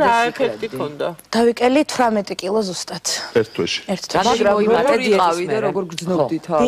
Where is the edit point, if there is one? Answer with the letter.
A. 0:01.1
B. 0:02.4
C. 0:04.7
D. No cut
B